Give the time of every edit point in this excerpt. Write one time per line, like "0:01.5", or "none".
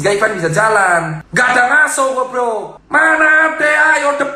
0:01.2
0:02.8